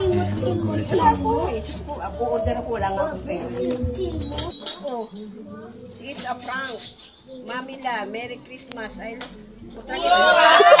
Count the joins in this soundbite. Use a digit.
0